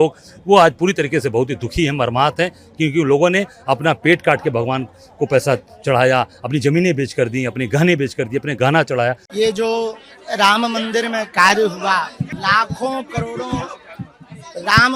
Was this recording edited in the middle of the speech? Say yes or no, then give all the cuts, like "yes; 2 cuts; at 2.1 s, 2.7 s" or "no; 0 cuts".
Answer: yes; 2 cuts; at 9.2 s, 12.3 s